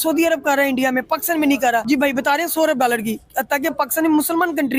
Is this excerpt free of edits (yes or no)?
no